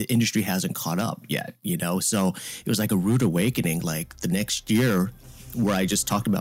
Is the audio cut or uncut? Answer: uncut